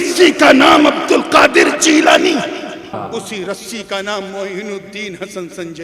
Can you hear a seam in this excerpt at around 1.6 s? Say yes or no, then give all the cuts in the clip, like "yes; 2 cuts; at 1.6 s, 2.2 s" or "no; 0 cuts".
no; 1 cut; at 3.0 s